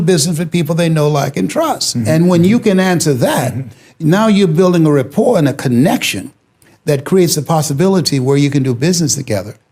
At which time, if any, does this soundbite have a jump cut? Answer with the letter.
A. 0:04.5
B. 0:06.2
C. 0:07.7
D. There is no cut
D